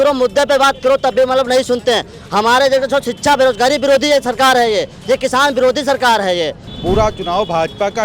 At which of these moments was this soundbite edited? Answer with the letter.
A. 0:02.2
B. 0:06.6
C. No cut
B